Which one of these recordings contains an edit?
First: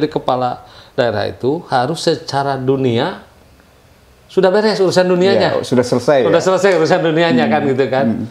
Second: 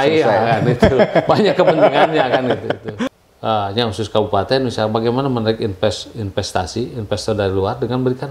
second; 1 cut; at 2.9 s

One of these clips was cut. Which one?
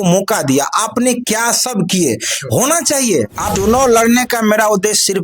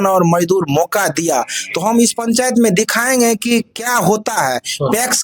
first; 1 cut; at 3.5 s

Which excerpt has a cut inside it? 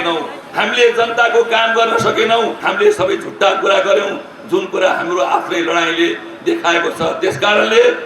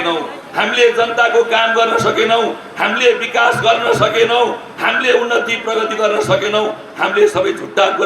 first; 1 cut; at 2.6 s

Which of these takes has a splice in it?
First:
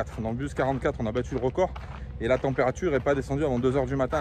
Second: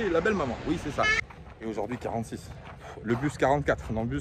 second; 1 cut; at 1.2 s

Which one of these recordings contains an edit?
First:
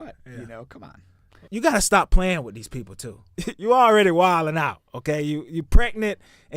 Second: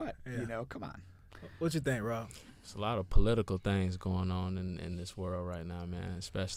first; 2 cuts; at 1.5 s, 3.5 s

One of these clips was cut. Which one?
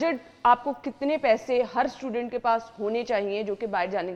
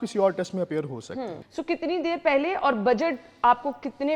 second; 1 cut; at 1.4 s

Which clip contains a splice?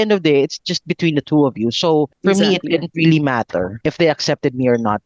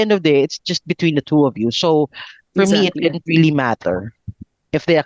first; 2 cuts; at 2.1 s, 3.7 s

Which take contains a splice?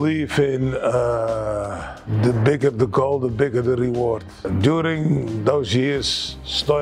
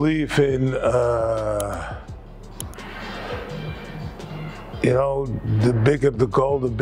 first; 2 cuts; at 2.0 s, 4.4 s

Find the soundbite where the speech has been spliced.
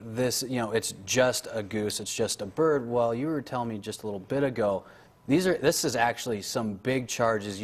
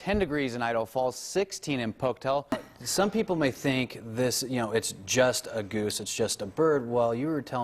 second; 1 cut; at 2.5 s

